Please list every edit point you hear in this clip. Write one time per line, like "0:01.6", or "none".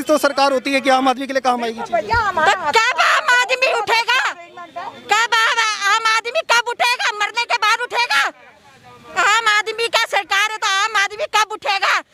none